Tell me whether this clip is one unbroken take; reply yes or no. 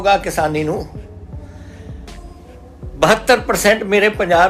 yes